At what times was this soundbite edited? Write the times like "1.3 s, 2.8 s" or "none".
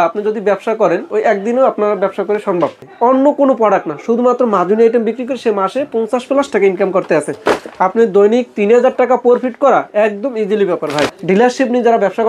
2.9 s, 7.7 s, 11.2 s